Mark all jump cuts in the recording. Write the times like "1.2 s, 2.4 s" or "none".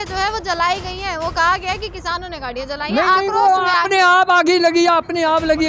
none